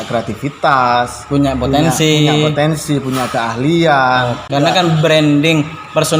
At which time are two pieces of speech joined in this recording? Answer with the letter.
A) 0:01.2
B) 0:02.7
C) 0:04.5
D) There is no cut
C